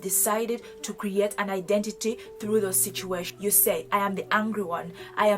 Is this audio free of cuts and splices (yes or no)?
no